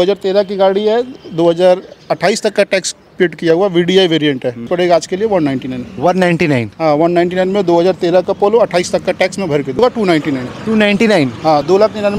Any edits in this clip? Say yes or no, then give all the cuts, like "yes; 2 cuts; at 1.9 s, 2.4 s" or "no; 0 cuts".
yes; 2 cuts; at 4.7 s, 9.8 s